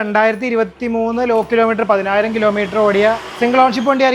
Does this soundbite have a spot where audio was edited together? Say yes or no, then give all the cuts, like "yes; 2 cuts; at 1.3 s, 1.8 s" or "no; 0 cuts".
no; 0 cuts